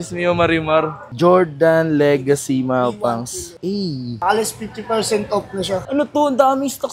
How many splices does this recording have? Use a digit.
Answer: 2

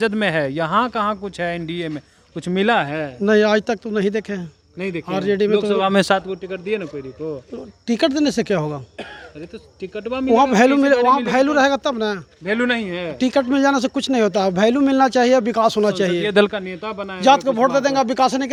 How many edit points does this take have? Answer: 0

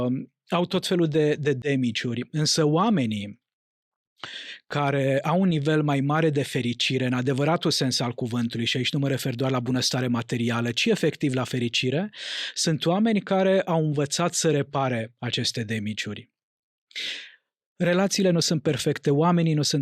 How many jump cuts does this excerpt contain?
0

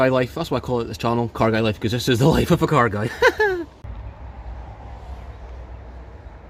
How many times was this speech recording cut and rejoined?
0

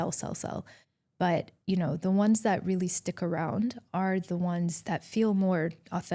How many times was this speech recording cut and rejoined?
1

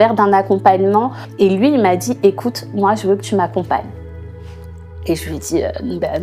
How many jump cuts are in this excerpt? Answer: 1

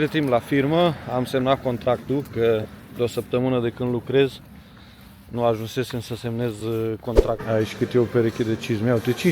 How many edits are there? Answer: 1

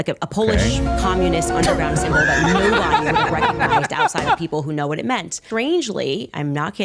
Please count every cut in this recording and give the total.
1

